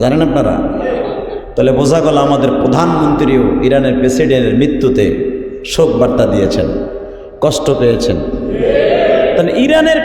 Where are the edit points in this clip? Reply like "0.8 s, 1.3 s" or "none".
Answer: 8.4 s